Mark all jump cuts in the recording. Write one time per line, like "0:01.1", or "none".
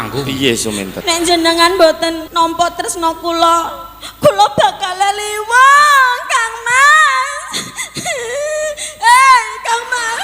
0:00.9
0:02.2